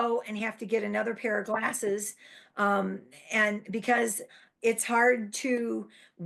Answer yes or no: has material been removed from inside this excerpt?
no